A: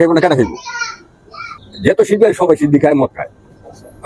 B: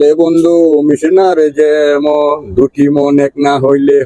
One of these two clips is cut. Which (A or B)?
A